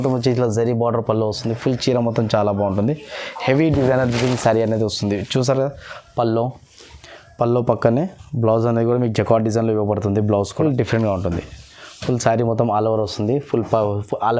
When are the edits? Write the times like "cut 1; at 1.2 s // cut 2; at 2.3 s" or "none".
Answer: cut 1; at 10.5 s